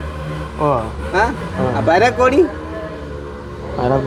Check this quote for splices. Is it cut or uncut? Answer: uncut